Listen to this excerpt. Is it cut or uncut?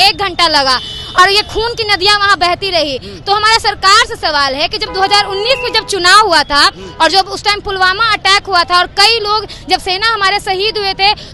uncut